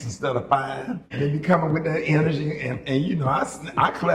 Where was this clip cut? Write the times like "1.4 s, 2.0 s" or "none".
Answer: 0.9 s